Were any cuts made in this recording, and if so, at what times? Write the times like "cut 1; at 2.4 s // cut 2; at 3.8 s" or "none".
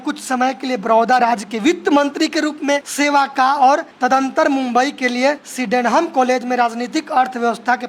cut 1; at 2.9 s // cut 2; at 3.9 s // cut 3; at 5.5 s